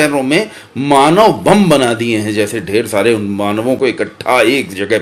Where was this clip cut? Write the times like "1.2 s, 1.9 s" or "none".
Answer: none